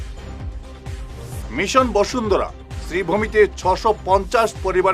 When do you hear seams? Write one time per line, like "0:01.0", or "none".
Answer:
0:01.0